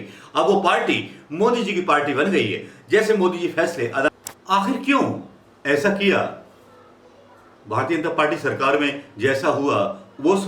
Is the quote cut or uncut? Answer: cut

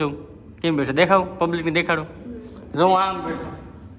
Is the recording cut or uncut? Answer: uncut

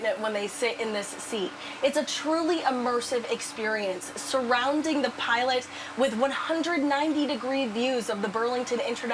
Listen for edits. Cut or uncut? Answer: uncut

